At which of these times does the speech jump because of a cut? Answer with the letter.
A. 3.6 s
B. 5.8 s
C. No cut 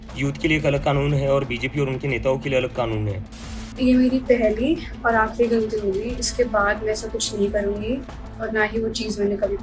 A